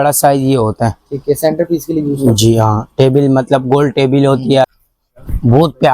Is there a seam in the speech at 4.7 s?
yes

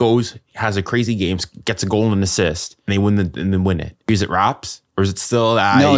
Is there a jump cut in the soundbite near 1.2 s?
no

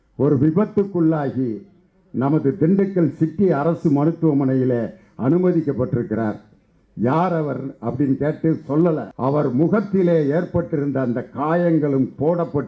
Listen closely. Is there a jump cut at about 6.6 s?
no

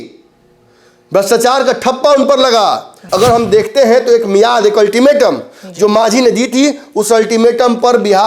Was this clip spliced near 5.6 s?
no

